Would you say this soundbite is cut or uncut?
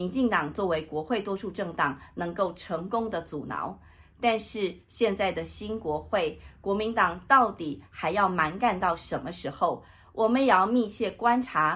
uncut